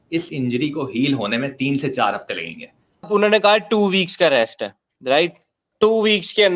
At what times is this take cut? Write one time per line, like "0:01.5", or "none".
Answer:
0:03.1